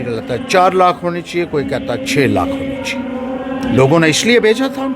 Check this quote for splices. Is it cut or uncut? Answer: cut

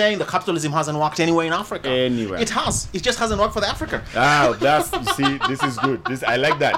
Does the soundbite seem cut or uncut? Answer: uncut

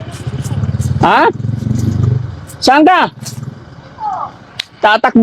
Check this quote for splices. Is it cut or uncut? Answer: uncut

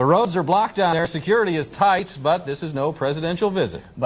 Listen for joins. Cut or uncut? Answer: cut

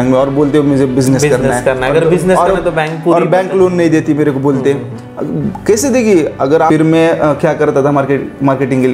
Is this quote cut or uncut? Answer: cut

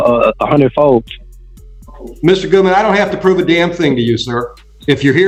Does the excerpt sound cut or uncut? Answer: uncut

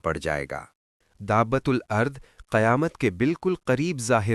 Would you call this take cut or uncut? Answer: uncut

